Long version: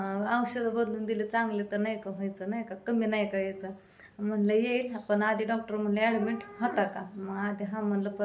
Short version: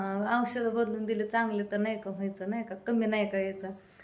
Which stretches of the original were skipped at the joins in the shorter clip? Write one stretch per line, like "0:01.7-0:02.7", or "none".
none